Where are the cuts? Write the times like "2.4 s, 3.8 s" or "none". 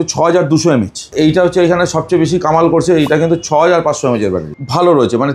1.1 s, 4.4 s